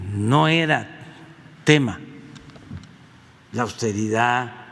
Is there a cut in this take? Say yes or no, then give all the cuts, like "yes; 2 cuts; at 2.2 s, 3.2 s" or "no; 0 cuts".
no; 0 cuts